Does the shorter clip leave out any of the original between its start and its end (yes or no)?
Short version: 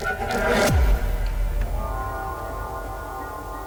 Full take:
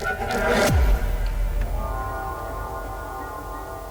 no